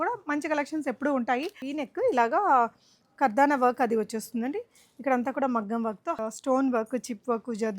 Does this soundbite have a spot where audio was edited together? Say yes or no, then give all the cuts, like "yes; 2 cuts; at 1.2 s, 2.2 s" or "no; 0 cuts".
yes; 2 cuts; at 1.7 s, 6.2 s